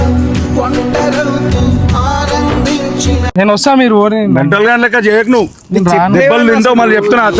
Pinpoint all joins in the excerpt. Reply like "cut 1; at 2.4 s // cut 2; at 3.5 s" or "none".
cut 1; at 3.3 s